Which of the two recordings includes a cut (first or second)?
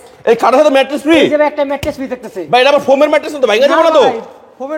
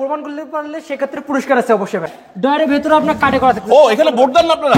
second